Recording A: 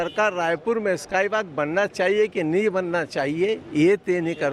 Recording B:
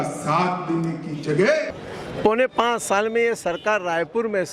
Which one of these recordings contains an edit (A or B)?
B